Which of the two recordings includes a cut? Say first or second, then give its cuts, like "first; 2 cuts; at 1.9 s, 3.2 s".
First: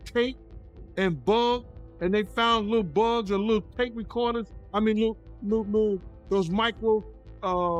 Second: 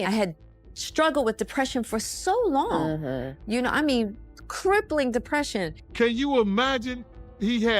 second; 1 cut; at 5.8 s